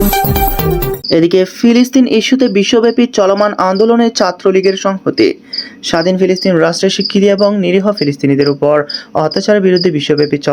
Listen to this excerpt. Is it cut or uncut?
uncut